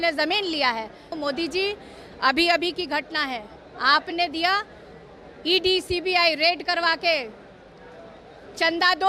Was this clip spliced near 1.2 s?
yes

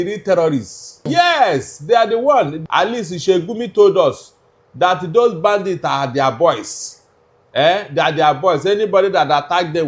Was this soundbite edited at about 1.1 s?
yes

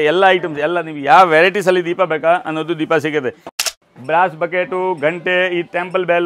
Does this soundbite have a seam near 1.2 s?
no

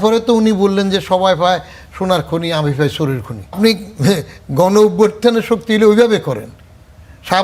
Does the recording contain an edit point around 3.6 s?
yes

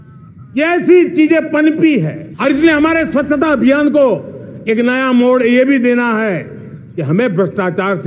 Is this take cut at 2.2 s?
yes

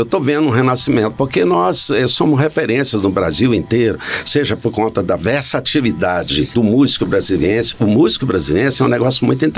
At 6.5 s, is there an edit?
yes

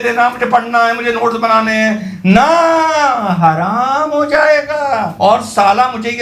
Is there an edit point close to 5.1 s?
yes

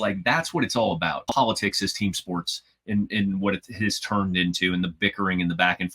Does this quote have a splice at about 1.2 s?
yes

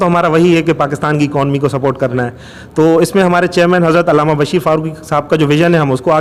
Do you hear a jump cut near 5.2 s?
no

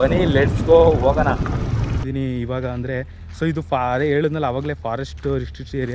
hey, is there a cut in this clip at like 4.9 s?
no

